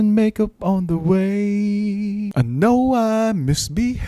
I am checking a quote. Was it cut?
yes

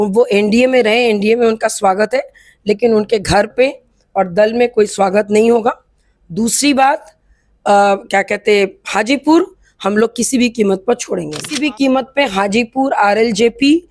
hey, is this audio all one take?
no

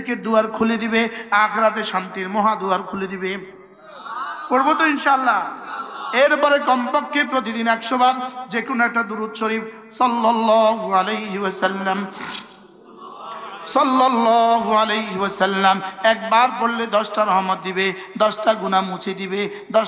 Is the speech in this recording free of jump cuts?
yes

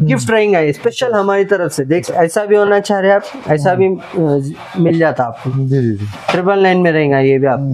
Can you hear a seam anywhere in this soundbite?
yes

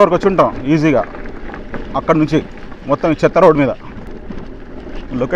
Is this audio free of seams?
no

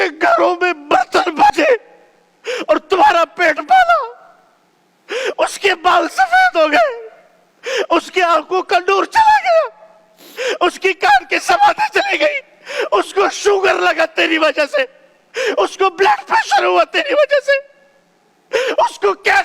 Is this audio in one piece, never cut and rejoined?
no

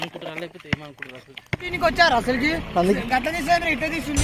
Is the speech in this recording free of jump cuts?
no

